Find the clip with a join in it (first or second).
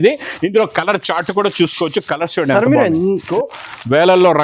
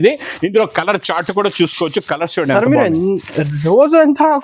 first